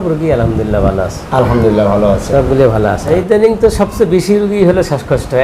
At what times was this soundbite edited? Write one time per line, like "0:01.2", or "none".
0:03.1